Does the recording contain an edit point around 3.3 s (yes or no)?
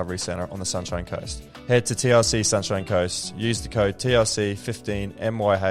no